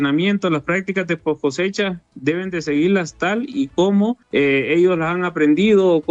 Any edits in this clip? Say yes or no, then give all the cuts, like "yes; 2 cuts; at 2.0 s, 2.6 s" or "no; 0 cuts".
no; 0 cuts